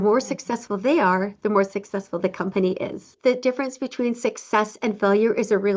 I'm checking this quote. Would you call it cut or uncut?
cut